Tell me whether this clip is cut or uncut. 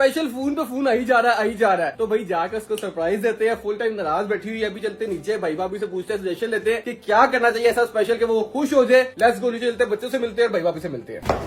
uncut